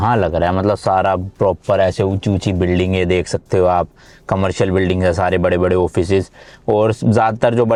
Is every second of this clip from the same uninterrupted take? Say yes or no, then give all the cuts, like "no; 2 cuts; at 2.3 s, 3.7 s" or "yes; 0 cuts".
yes; 0 cuts